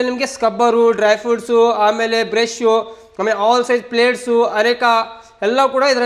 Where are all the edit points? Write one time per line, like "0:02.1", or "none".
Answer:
none